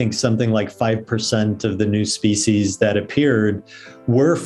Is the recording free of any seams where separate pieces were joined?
yes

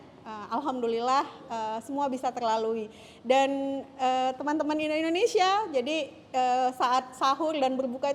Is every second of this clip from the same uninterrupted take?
yes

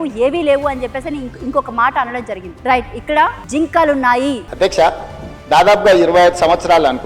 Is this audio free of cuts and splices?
no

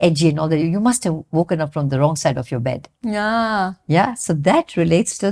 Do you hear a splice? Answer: no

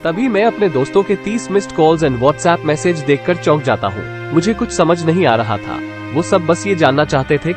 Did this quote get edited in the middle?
no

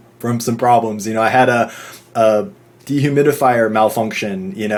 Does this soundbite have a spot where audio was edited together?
no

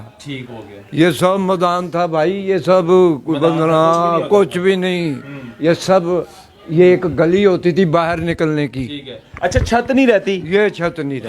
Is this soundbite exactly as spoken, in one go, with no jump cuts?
yes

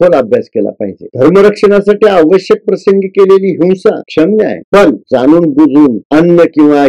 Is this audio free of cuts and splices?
no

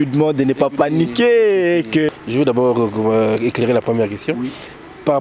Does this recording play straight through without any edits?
no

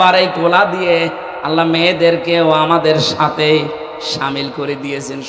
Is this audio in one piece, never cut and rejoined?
yes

